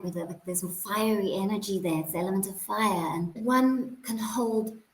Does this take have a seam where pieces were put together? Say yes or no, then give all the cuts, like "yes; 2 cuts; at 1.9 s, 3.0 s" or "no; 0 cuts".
yes; 1 cut; at 3.3 s